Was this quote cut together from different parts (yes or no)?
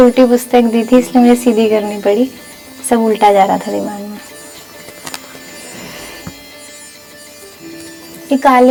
no